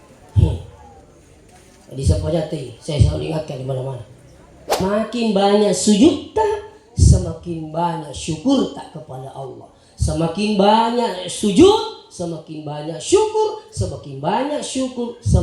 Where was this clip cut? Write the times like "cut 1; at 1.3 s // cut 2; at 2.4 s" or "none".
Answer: cut 1; at 4.8 s